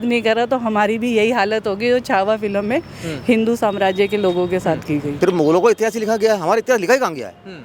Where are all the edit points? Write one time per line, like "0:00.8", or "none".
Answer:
0:05.1